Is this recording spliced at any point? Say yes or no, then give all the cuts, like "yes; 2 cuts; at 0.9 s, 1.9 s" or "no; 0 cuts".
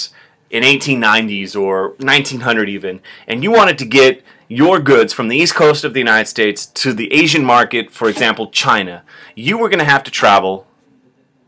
yes; 1 cut; at 1.6 s